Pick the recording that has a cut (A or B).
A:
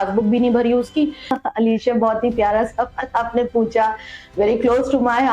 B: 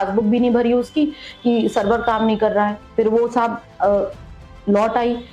A